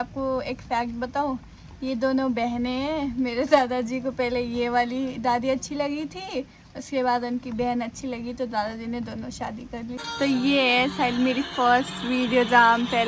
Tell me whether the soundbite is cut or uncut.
cut